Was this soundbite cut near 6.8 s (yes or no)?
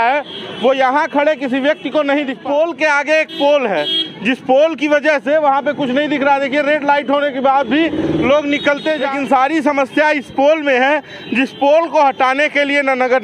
no